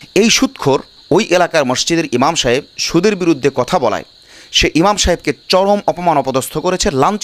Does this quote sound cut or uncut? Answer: cut